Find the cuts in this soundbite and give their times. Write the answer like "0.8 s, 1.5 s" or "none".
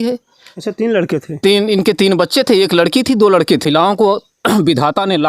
3.6 s